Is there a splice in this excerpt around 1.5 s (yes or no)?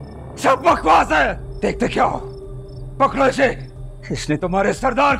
yes